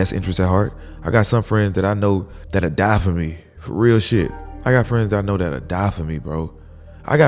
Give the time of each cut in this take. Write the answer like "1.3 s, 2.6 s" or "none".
2.4 s, 4.5 s